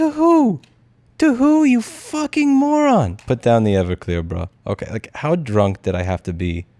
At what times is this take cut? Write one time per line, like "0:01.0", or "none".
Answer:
0:03.2